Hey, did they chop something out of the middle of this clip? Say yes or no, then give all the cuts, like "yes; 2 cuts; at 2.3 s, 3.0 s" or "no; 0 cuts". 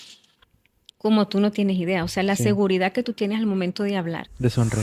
no; 0 cuts